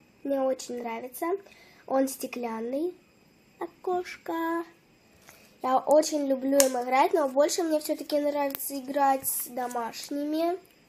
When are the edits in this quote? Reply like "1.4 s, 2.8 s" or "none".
3.7 s